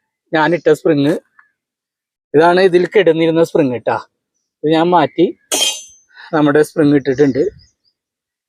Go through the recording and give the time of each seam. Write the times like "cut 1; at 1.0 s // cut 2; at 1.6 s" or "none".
none